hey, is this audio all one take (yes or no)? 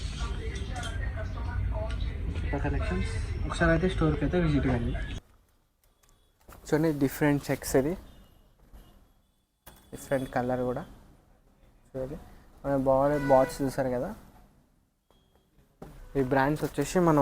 no